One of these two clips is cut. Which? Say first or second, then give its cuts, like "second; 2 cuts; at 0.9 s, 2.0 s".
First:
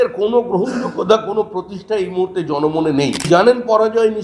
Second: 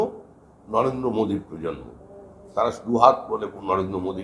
first; 1 cut; at 3.3 s